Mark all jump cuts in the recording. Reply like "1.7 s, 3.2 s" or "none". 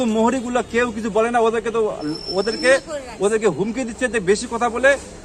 none